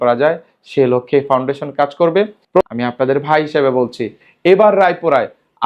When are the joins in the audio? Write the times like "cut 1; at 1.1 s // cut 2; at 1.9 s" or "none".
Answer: cut 1; at 2.6 s